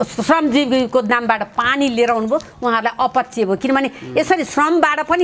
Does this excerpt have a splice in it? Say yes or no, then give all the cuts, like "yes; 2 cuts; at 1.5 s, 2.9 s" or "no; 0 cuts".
no; 0 cuts